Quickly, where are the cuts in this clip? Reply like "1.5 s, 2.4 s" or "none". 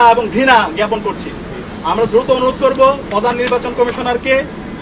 none